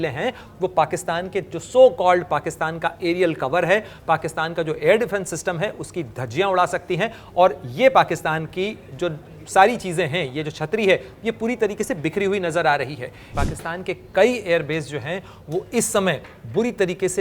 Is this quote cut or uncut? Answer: cut